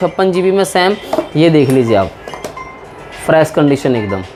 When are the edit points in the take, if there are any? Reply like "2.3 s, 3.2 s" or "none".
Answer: none